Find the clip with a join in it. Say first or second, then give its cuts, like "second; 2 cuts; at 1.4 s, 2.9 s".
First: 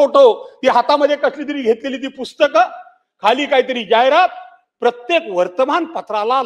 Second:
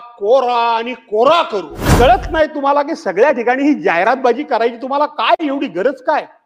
second; 1 cut; at 1.9 s